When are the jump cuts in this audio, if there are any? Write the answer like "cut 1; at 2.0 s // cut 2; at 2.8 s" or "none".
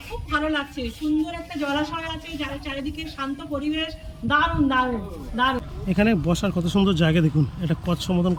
cut 1; at 5.6 s